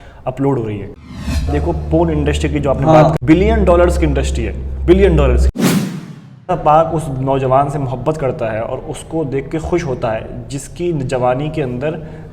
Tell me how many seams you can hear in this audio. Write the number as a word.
two